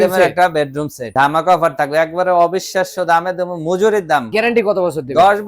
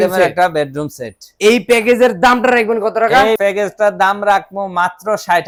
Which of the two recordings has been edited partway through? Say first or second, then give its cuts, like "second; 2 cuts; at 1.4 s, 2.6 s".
first; 2 cuts; at 1.0 s, 4.3 s